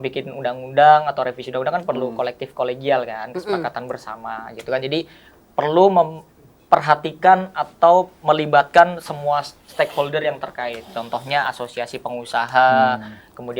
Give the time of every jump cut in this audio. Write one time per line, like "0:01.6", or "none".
none